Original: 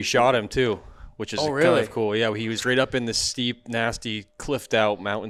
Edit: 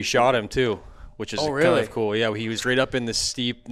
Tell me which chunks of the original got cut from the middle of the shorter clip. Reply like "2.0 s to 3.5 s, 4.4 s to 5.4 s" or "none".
none